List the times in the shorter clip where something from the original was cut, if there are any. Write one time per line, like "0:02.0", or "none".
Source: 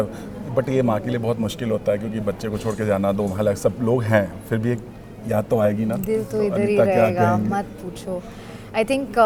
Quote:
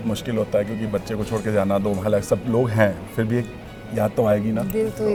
none